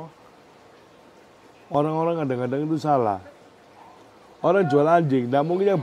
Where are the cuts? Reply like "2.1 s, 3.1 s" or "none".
none